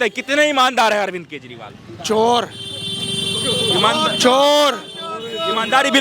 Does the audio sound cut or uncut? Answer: uncut